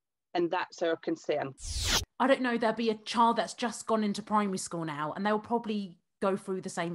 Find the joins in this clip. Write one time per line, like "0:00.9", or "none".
0:01.6